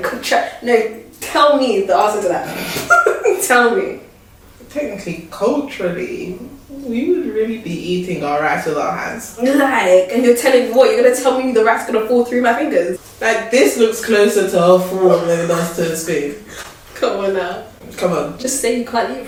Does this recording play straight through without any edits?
yes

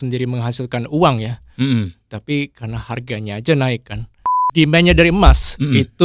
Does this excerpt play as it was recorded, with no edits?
no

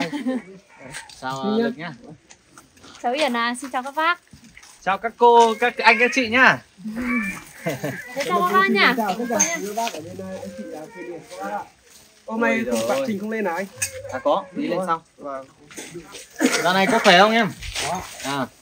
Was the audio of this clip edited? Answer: no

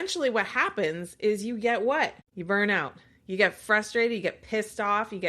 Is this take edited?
yes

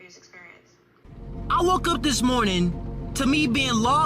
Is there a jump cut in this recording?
yes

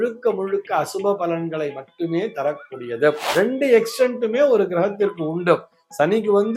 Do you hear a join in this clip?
yes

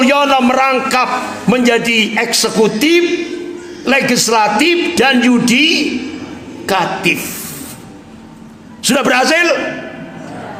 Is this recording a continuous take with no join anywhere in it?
yes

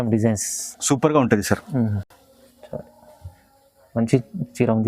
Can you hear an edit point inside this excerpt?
no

